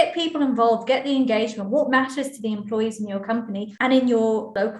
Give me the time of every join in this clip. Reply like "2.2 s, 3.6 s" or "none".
3.7 s